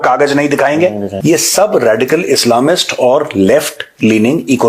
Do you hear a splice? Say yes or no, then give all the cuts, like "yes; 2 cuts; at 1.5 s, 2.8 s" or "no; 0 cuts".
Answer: yes; 1 cut; at 1.1 s